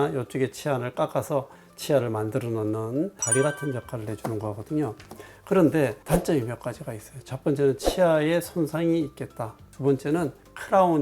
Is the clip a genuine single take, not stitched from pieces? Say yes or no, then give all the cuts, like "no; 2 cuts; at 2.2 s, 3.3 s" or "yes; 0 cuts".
no; 1 cut; at 6.0 s